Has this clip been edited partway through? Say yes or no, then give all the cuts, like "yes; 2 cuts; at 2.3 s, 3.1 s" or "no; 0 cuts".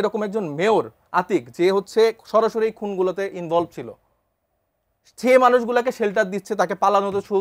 no; 0 cuts